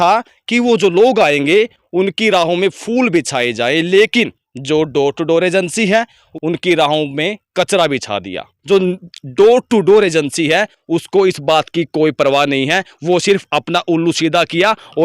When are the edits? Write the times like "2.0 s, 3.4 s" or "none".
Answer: 6.2 s, 8.5 s